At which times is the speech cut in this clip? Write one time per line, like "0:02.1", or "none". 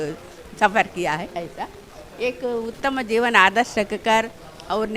none